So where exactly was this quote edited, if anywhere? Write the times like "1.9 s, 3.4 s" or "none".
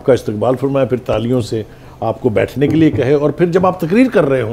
none